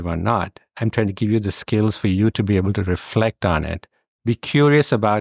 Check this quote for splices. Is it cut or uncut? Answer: cut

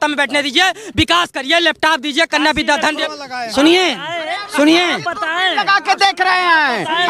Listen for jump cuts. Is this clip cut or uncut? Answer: cut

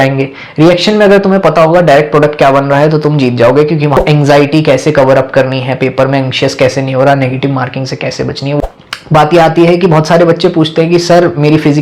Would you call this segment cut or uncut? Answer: cut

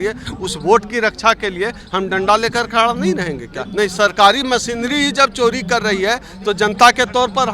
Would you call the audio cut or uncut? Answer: cut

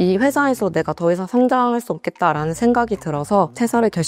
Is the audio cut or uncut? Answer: uncut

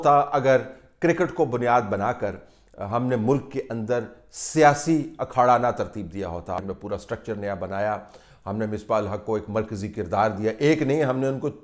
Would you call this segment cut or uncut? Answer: cut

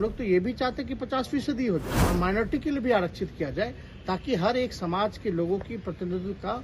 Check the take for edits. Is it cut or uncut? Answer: cut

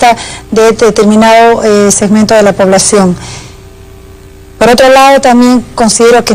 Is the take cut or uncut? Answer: cut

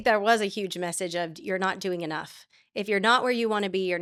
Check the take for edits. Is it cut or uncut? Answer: uncut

